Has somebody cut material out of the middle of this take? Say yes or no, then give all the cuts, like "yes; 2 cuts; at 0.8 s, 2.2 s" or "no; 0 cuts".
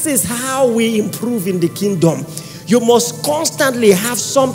no; 0 cuts